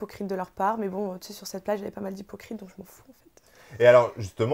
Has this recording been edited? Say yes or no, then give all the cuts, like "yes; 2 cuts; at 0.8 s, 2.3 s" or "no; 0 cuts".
no; 0 cuts